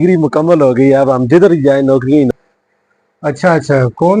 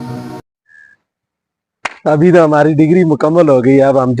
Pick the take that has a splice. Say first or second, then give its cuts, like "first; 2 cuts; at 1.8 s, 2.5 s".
first; 1 cut; at 2.3 s